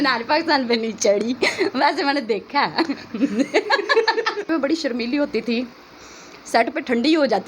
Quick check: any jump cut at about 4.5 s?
yes; 1 cut; at 4.5 s

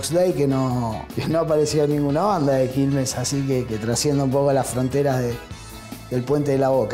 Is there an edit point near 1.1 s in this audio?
yes; 1 cut; at 1.1 s

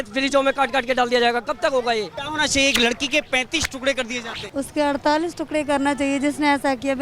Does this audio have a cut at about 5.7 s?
no; 2 cuts; at 2.2 s, 4.4 s

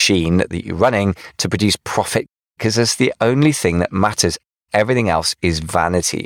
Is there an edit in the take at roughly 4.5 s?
yes; 2 cuts; at 2.4 s, 4.5 s

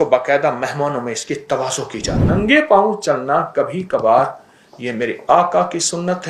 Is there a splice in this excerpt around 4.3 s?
no; 1 cut; at 2.3 s

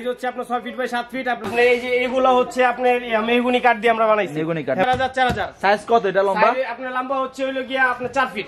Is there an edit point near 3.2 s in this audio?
no; 2 cuts; at 1.5 s, 4.8 s

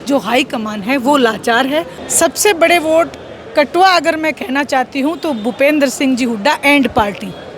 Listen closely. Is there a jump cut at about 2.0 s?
yes; 1 cut; at 2.0 s

